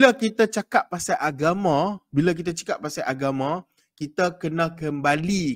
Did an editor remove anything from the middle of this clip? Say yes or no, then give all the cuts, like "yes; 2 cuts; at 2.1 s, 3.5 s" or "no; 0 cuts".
no; 0 cuts